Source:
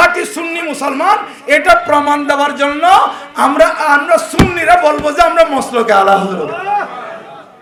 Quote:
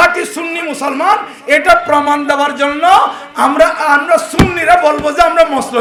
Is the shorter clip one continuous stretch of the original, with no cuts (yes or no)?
yes